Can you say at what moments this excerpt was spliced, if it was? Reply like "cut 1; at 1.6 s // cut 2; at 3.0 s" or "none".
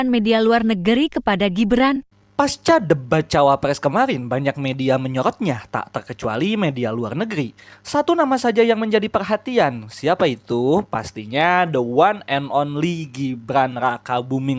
none